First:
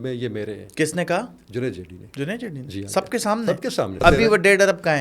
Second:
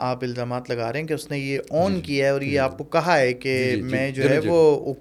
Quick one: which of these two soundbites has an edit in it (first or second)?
first